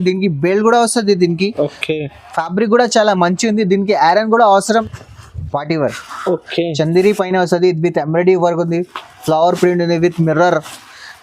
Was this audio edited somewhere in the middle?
yes; 1 cut; at 4.8 s

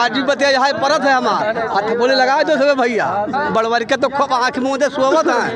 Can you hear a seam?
yes; 1 cut; at 3.5 s

